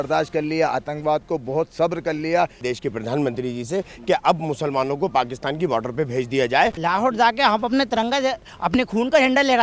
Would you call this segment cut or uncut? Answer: cut